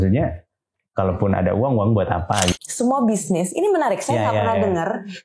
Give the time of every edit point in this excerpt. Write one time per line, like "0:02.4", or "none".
0:02.6